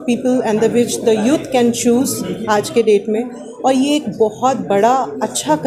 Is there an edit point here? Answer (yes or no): no